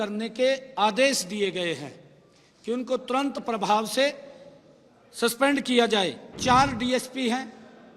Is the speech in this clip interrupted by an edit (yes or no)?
yes